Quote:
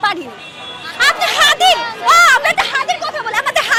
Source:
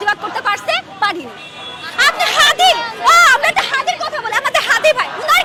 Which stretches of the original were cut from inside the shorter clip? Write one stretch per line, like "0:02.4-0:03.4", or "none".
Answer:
none

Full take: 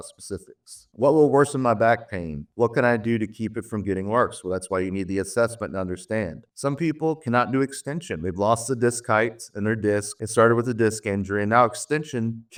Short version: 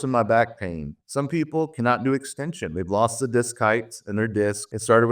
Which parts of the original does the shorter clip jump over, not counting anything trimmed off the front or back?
0:02.4-0:06.4

